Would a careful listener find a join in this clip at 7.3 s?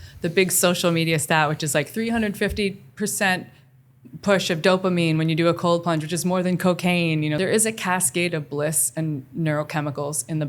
yes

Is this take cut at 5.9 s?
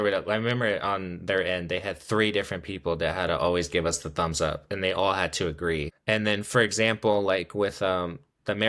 yes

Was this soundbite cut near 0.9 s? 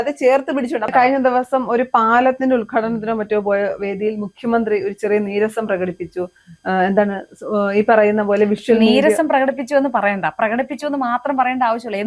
yes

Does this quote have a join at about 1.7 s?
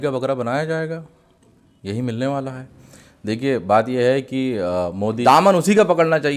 no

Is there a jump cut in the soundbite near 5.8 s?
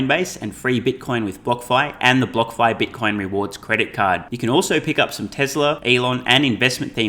yes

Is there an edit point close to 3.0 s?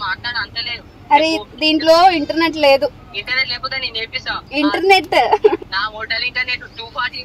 yes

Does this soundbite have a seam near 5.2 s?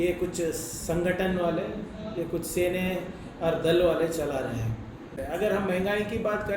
yes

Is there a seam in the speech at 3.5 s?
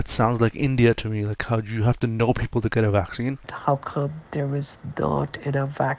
yes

